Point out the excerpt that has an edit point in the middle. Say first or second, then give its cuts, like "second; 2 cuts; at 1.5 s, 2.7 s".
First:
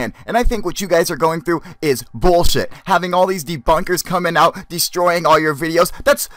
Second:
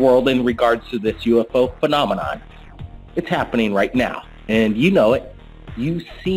second; 1 cut; at 4.1 s